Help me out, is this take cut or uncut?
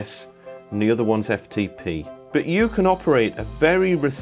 cut